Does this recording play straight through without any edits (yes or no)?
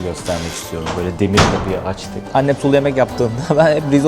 no